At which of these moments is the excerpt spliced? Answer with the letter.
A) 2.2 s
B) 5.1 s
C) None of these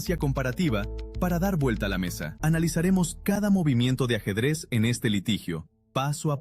A